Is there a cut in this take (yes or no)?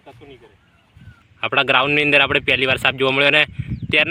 yes